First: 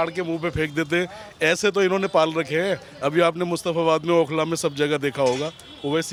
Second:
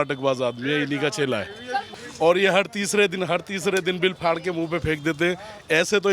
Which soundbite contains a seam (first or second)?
second